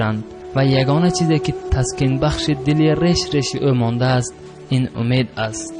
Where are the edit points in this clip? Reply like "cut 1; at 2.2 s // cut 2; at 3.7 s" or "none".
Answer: cut 1; at 1.4 s